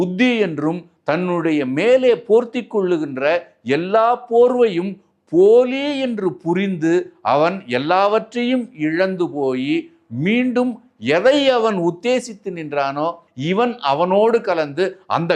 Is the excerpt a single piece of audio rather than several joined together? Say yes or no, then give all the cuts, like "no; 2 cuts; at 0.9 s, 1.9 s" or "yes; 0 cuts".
no; 1 cut; at 13.3 s